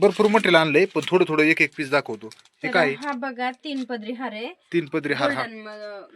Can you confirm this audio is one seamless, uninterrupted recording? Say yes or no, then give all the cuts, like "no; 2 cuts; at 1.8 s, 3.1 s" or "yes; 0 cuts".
yes; 0 cuts